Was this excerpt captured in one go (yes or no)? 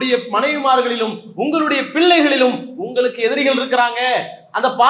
yes